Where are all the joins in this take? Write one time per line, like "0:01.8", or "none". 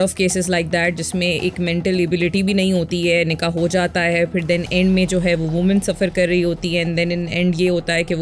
none

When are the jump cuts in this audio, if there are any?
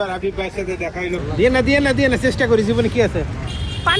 0:01.2

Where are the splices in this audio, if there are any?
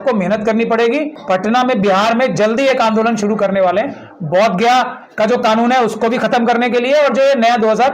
0:01.1

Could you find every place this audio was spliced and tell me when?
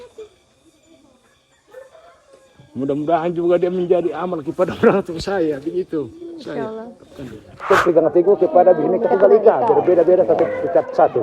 0:07.7

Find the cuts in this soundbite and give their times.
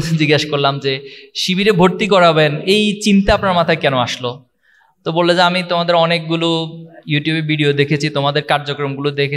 none

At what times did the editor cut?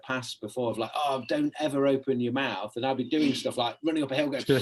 none

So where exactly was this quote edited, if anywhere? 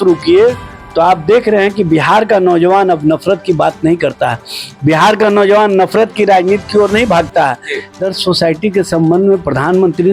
0:08.0

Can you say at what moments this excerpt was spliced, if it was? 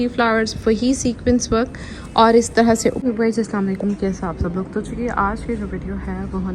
0:03.0

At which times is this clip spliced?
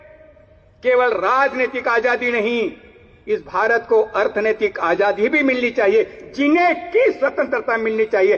none

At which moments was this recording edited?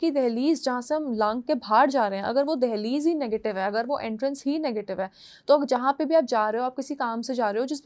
none

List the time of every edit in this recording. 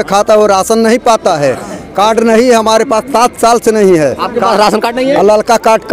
none

